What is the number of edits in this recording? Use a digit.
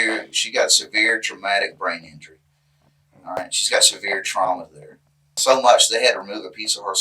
1